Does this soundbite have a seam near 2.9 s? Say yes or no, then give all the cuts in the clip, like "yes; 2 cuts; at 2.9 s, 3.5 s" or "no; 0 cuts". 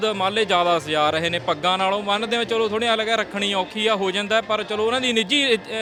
no; 0 cuts